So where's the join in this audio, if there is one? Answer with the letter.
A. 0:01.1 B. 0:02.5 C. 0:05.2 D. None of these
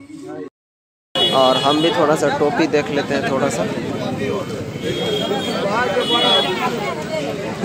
A